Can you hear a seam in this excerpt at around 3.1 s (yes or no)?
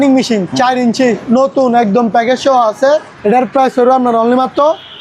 yes